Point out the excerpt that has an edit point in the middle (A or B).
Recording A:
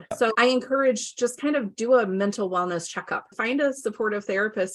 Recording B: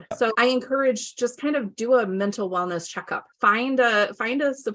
A